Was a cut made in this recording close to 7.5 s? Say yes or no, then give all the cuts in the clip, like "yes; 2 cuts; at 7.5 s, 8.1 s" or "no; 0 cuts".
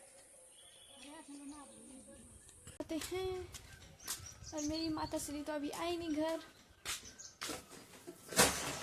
yes; 2 cuts; at 2.8 s, 7.5 s